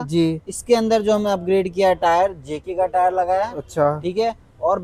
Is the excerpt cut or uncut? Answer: uncut